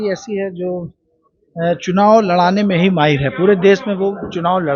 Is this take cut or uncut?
uncut